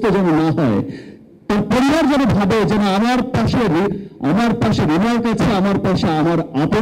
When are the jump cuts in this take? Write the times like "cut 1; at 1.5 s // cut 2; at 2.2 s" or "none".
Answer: none